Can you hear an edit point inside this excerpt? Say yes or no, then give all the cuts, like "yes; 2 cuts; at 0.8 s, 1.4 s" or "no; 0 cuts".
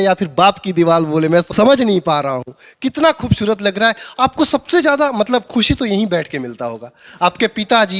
no; 0 cuts